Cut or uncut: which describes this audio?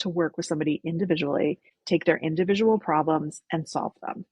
cut